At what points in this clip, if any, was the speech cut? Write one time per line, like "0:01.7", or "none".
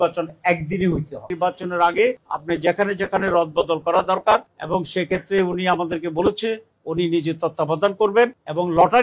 0:01.3
0:04.5